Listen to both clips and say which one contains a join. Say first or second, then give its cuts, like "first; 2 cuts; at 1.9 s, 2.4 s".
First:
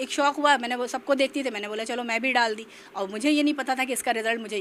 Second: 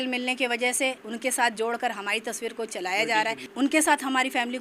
second; 2 cuts; at 1.1 s, 3.4 s